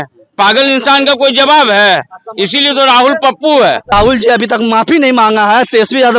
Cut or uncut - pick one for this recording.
cut